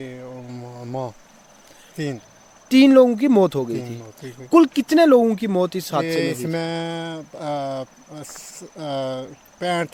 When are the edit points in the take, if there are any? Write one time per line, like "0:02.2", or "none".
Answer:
none